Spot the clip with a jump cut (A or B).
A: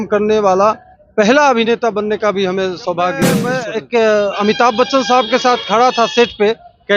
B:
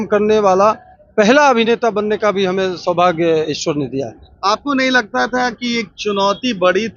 A